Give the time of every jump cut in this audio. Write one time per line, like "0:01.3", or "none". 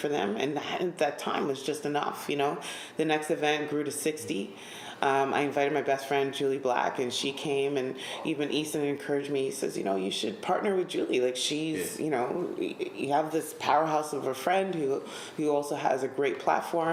none